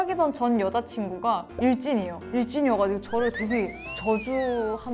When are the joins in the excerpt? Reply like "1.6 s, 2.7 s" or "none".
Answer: none